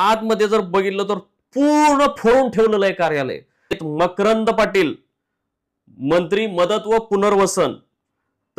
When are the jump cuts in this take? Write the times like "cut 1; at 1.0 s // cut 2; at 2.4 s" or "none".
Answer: cut 1; at 3.8 s